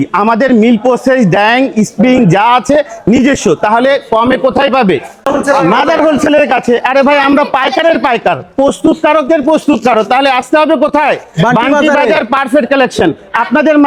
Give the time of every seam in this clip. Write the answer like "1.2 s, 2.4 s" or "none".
none